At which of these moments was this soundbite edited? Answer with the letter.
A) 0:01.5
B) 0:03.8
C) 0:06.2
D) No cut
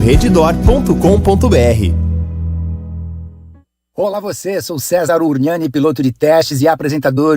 B